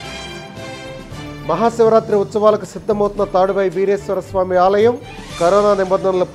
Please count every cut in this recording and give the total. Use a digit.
1